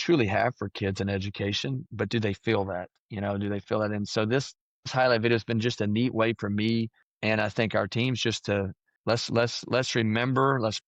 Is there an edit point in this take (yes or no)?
yes